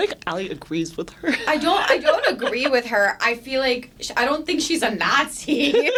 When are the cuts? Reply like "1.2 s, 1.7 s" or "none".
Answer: none